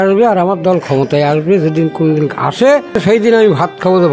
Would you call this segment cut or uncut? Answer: cut